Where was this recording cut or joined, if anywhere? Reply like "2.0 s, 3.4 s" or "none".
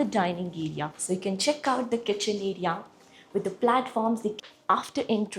0.9 s, 4.4 s